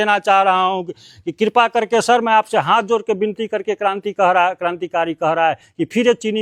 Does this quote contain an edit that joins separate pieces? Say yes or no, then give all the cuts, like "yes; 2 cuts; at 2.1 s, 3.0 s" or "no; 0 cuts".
no; 0 cuts